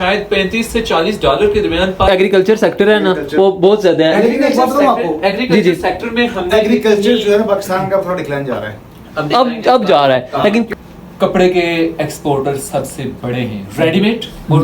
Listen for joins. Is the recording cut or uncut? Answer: cut